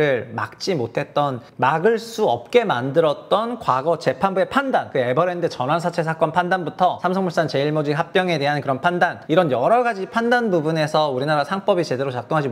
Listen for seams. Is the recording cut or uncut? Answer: cut